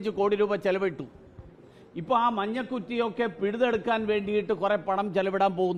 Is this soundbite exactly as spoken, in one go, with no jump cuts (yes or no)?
yes